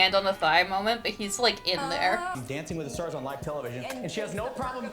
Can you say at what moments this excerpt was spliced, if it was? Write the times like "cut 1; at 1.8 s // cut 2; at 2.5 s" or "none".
cut 1; at 2.4 s